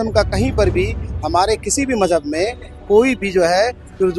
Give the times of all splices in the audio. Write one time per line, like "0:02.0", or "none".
none